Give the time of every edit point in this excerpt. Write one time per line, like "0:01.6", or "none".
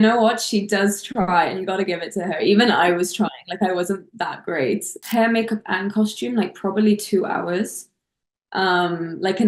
0:05.0